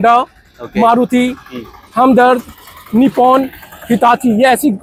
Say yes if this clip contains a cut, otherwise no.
no